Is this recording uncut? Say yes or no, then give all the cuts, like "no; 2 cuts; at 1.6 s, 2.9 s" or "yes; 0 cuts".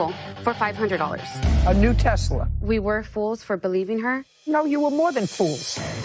yes; 0 cuts